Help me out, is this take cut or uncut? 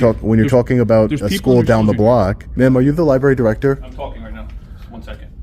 cut